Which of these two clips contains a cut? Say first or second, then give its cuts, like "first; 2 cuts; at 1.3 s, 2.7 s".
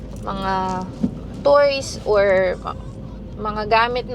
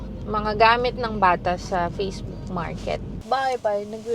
second; 1 cut; at 3.2 s